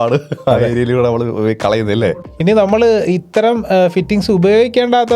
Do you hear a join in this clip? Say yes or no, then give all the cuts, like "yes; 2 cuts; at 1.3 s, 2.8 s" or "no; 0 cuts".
yes; 1 cut; at 2.0 s